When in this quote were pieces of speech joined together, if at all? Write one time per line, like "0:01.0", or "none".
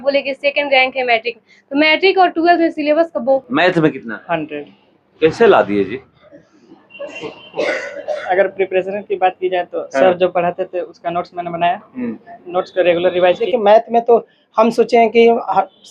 0:03.4
0:13.4